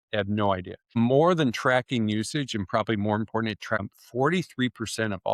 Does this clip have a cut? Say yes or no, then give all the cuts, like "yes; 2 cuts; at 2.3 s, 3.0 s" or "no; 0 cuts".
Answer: yes; 2 cuts; at 0.9 s, 4.0 s